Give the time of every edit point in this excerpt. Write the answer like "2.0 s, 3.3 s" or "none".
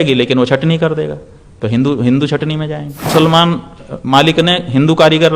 3.1 s